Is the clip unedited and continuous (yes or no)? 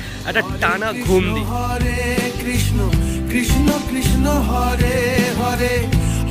no